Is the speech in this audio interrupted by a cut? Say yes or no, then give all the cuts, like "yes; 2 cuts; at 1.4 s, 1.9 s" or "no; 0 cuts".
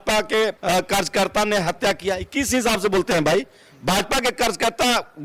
no; 0 cuts